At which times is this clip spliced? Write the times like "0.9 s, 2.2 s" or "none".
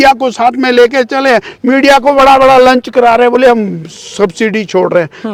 none